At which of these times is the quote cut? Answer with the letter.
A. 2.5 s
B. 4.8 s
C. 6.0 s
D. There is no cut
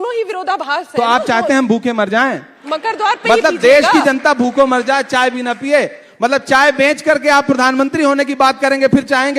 A